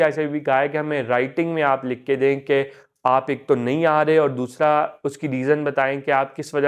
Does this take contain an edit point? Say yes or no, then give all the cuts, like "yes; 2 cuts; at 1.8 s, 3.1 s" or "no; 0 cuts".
no; 0 cuts